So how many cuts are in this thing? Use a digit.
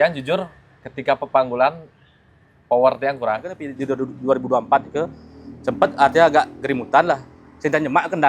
1